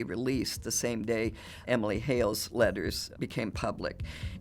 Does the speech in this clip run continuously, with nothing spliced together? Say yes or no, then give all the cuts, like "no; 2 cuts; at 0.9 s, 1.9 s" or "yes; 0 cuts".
no; 1 cut; at 3.1 s